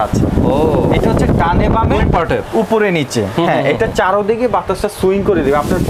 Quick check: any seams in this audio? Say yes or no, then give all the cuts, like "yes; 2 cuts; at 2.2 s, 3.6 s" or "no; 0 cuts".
no; 0 cuts